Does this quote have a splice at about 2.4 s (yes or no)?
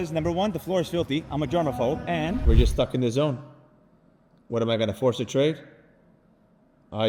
yes